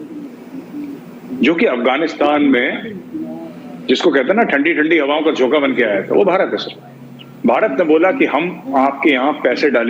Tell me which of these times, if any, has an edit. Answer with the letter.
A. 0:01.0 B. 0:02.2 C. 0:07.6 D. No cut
D